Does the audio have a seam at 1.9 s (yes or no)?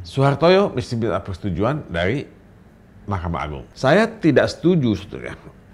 no